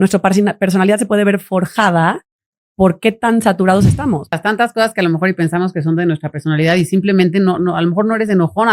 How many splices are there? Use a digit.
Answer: 1